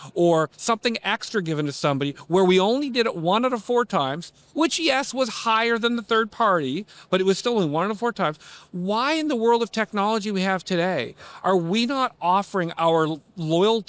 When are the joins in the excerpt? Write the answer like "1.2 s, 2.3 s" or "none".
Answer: none